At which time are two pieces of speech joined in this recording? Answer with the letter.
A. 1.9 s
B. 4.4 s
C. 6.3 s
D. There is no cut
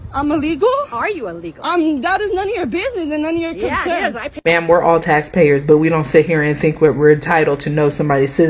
B